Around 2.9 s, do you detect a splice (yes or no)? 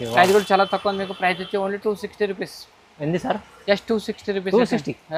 no